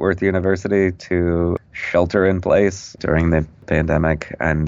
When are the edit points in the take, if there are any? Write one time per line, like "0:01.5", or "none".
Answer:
0:03.6